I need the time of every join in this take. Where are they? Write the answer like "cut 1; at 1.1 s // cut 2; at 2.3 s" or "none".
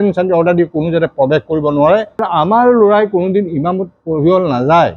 cut 1; at 2.2 s